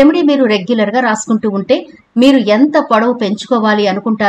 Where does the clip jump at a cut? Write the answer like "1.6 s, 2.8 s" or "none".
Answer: none